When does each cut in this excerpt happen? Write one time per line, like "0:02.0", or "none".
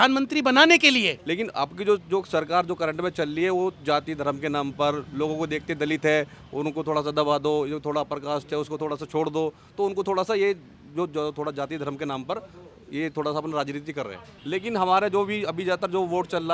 0:01.2
0:14.4